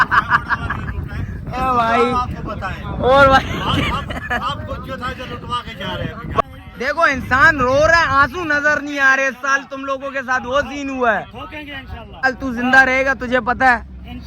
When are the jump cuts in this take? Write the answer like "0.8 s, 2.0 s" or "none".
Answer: 6.4 s, 12.3 s